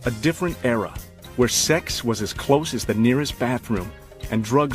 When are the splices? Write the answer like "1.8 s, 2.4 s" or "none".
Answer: 3.7 s

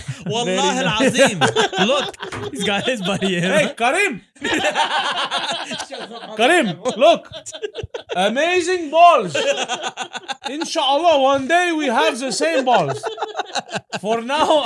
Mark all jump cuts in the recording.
none

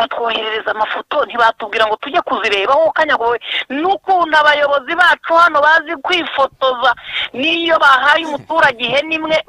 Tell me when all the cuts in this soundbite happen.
none

